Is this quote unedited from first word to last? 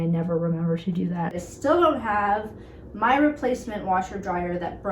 no; 1 cut; at 1.4 s

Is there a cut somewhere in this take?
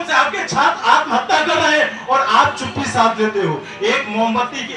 no; 0 cuts

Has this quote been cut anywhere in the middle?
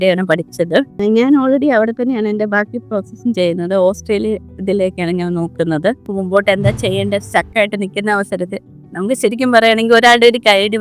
yes; 2 cuts; at 0.9 s, 6.1 s

